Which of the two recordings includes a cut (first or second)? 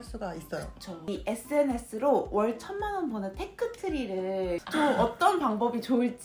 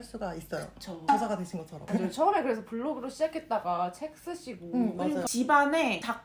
first